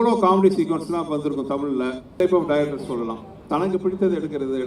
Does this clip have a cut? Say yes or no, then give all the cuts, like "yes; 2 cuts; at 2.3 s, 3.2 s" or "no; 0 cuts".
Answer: yes; 1 cut; at 2.2 s